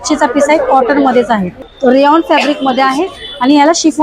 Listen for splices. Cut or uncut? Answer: cut